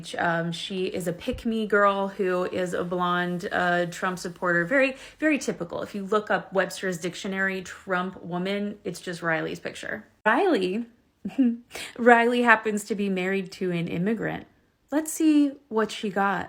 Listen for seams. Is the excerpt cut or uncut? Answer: uncut